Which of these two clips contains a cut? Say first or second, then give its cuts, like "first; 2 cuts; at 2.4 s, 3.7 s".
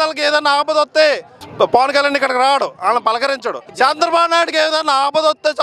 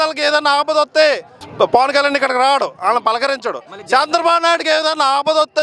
first; 1 cut; at 3.6 s